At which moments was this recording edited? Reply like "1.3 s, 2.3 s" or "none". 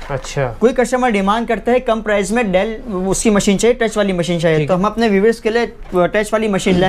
none